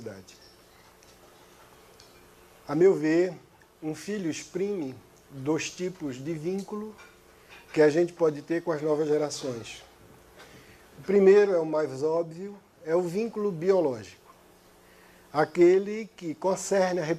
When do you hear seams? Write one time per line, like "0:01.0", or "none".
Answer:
none